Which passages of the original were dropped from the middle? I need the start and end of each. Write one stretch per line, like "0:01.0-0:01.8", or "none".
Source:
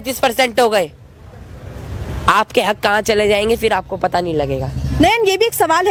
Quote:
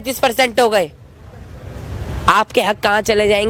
none